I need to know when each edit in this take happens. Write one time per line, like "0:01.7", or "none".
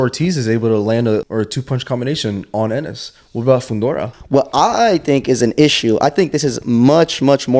0:01.2
0:04.1